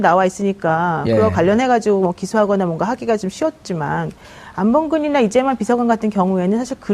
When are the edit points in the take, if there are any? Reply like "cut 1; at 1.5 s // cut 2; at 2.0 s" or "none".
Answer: cut 1; at 5.1 s